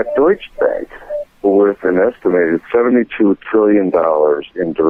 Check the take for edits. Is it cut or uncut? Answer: uncut